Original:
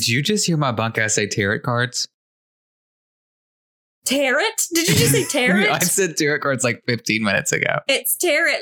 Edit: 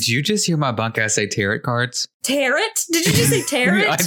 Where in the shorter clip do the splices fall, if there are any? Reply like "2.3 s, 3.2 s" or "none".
2.1 s